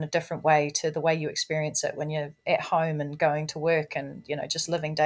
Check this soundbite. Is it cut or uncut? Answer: uncut